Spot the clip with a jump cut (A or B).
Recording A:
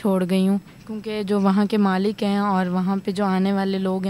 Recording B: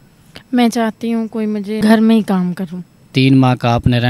B